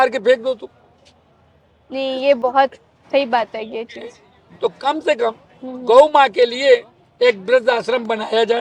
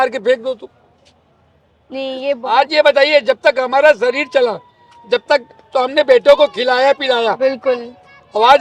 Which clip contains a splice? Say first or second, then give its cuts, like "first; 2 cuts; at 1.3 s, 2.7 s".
second; 1 cut; at 2.4 s